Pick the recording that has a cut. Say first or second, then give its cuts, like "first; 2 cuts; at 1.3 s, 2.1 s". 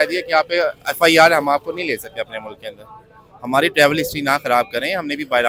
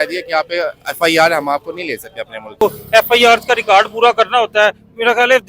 second; 1 cut; at 2.6 s